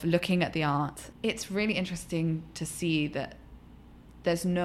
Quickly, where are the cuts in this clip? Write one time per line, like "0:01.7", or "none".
0:01.0